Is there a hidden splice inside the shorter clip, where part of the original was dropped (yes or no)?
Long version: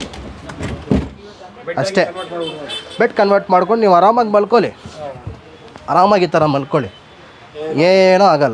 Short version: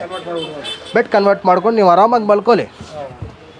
no